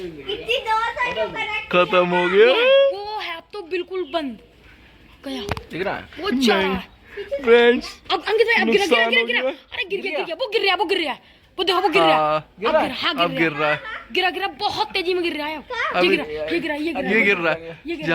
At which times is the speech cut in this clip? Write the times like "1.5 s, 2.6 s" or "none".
none